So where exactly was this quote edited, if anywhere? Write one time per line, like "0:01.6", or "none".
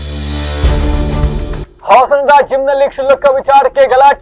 0:01.7